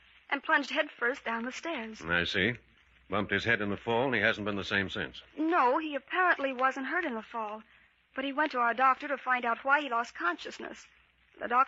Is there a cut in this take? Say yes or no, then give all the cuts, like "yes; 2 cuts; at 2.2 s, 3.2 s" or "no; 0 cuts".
no; 0 cuts